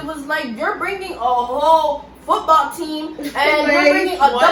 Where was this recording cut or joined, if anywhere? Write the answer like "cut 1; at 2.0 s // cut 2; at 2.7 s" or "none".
none